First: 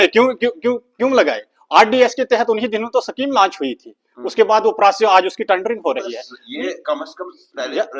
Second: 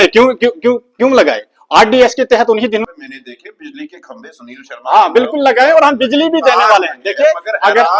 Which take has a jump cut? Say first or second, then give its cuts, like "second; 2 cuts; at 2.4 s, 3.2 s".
second; 1 cut; at 2.9 s